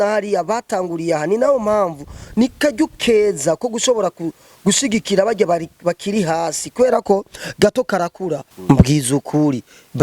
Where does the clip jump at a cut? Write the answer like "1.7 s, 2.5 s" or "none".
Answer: 8.5 s